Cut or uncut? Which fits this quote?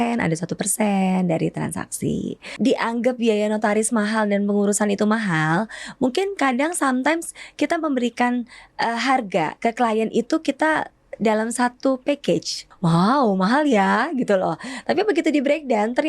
cut